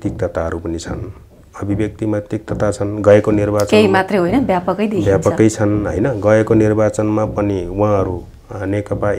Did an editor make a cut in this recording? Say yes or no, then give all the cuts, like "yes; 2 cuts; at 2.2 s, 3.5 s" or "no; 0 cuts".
no; 0 cuts